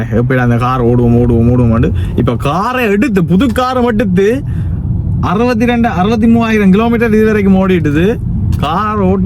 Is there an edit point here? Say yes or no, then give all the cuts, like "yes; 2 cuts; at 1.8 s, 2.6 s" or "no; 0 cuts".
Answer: no; 0 cuts